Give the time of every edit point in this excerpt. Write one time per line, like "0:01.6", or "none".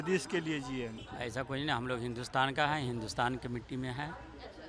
0:01.1